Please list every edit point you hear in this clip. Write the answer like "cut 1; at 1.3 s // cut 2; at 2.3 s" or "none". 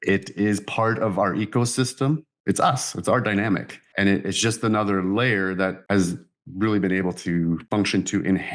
cut 1; at 2.3 s // cut 2; at 5.8 s // cut 3; at 7.6 s